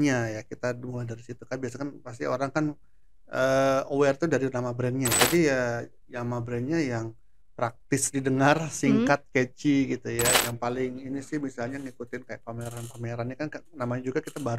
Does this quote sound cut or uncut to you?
cut